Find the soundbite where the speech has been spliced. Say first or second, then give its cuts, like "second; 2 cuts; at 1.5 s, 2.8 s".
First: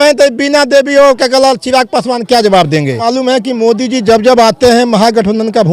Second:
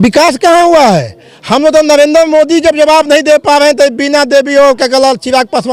first; 1 cut; at 3.1 s